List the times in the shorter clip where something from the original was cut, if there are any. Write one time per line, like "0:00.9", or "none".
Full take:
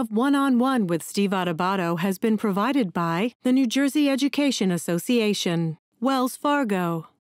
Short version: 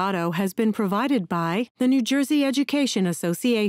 none